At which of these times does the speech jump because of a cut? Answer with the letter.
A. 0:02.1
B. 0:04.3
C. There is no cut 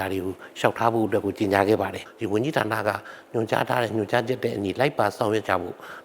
A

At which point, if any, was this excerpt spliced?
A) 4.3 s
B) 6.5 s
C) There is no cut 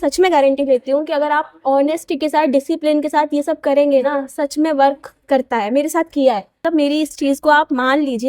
B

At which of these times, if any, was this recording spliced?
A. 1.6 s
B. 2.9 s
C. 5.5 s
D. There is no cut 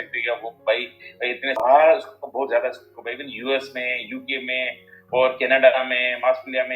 A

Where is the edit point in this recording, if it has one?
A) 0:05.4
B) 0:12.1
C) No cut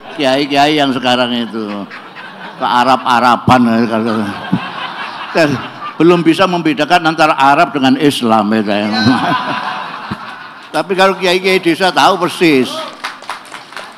C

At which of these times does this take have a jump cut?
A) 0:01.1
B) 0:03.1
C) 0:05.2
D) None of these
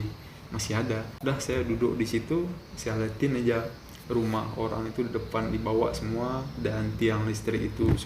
A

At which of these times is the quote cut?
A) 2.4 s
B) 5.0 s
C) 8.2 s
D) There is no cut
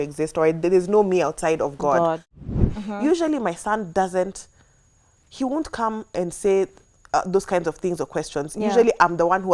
A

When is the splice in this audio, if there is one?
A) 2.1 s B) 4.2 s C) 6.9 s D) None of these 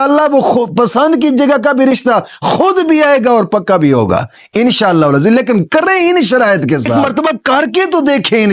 C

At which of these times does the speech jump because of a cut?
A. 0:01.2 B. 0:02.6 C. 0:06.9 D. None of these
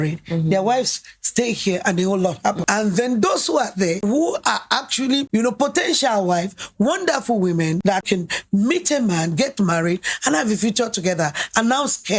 B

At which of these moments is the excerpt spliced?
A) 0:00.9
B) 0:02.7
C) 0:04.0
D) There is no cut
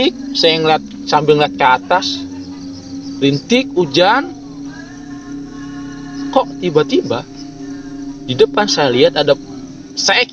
D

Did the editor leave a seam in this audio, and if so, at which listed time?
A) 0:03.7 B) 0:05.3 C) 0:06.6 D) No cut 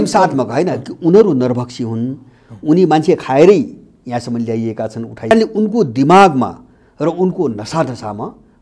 B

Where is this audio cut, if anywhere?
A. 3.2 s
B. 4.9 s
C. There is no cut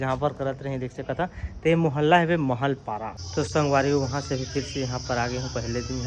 A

